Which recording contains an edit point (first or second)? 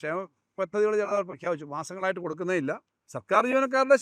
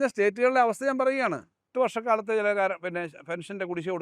second